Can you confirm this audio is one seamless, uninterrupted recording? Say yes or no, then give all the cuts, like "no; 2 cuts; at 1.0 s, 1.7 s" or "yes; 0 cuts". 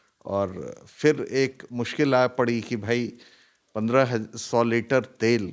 yes; 0 cuts